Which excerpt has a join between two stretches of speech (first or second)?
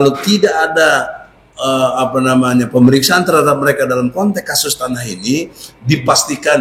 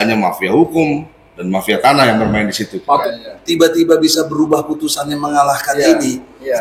second